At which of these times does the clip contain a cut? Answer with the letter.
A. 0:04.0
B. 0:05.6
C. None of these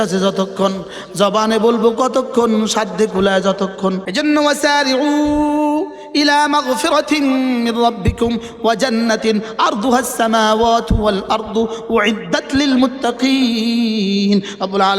A